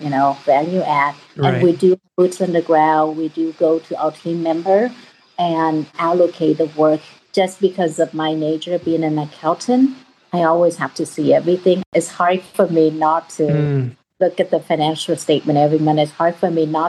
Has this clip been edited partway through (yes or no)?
no